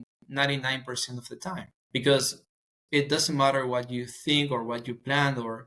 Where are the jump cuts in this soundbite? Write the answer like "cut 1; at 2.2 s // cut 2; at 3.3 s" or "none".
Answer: cut 1; at 1.7 s